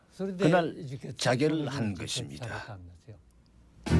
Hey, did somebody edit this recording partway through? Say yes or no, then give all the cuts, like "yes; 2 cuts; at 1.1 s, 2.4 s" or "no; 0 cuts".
no; 0 cuts